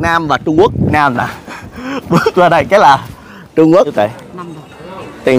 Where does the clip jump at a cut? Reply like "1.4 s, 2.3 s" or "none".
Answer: 0.9 s, 3.9 s